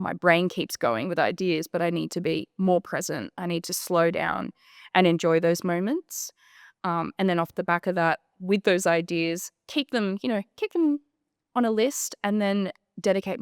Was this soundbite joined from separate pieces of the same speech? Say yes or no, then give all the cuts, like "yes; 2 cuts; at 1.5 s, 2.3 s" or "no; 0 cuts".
no; 0 cuts